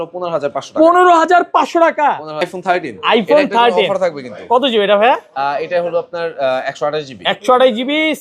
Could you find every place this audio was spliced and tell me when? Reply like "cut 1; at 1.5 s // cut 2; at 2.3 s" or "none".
cut 1; at 2.6 s